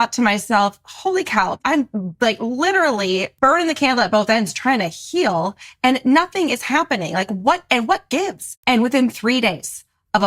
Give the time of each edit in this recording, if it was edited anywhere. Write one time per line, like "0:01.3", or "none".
0:01.5
0:03.3
0:08.5